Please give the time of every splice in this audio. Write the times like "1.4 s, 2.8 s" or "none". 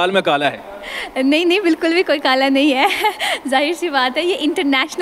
none